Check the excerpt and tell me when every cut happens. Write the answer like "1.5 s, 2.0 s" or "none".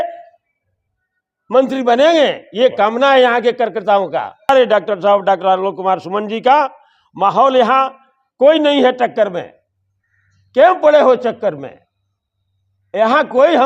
4.5 s